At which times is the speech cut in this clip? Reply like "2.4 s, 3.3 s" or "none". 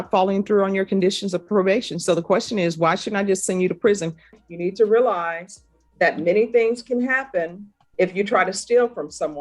4.3 s